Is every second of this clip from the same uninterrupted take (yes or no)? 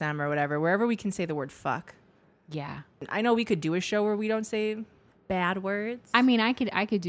no